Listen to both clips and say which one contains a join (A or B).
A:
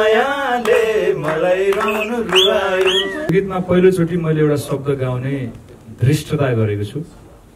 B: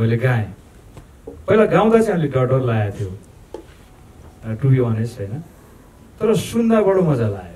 A